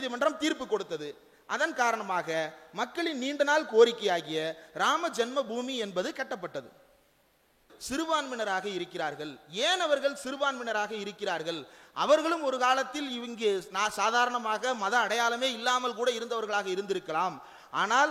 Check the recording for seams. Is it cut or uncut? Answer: cut